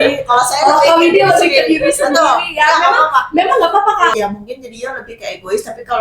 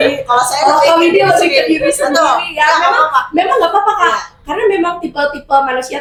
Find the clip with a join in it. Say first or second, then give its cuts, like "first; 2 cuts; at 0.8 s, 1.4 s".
first; 1 cut; at 4.1 s